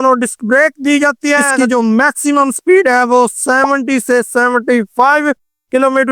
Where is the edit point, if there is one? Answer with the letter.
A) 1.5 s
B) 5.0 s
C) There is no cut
A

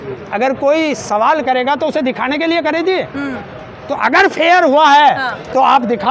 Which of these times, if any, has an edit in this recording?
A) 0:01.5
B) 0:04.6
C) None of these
C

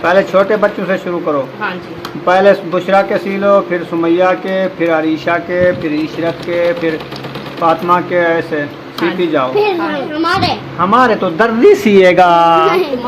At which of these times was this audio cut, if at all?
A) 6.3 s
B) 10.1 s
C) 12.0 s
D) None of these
B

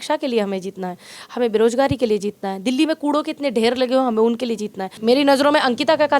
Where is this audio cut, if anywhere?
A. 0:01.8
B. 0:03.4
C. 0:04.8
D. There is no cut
C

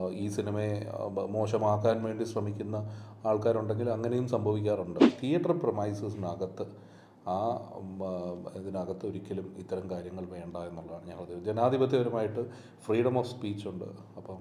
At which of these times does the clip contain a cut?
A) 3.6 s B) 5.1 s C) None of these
B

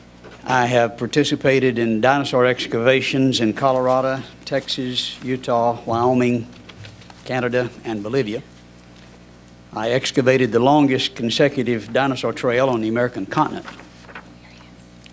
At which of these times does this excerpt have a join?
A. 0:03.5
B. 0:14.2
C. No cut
A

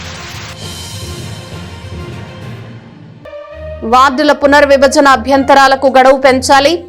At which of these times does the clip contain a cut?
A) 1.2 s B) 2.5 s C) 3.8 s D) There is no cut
C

